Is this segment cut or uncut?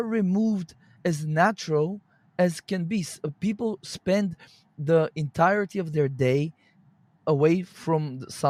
uncut